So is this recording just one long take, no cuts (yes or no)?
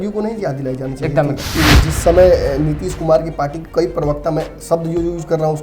no